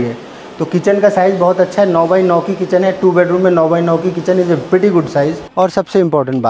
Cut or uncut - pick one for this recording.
cut